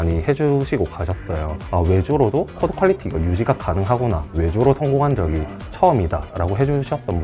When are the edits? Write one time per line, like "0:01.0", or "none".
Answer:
0:04.3